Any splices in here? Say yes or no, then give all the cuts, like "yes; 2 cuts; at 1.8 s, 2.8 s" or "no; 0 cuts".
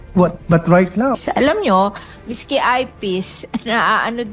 yes; 1 cut; at 1.2 s